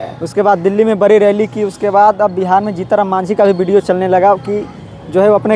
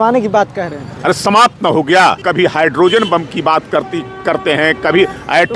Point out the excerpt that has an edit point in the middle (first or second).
second